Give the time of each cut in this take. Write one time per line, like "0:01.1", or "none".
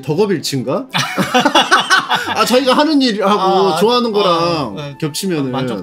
none